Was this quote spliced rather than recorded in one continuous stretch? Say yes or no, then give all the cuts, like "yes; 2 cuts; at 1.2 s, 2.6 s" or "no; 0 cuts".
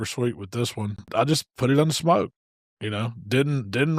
yes; 1 cut; at 1.1 s